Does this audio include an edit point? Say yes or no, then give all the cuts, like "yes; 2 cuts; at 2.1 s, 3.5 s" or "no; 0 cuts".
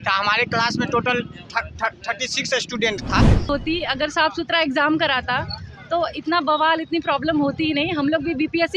yes; 1 cut; at 3.5 s